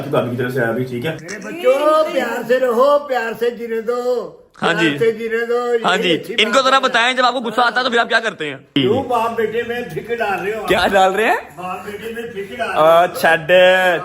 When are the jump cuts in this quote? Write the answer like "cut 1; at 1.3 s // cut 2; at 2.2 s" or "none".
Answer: cut 1; at 1.3 s // cut 2; at 8.8 s